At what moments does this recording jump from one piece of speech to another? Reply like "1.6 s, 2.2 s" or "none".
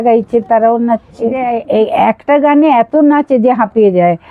1.4 s